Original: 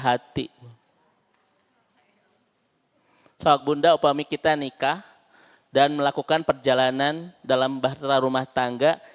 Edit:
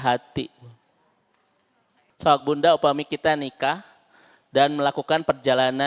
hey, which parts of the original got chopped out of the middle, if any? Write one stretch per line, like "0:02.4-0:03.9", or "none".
0:02.1-0:03.3